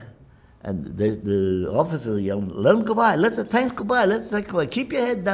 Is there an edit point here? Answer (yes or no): no